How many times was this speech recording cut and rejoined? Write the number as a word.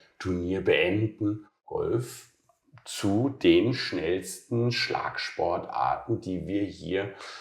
one